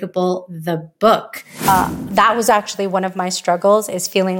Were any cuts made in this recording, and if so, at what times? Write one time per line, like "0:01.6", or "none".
0:01.7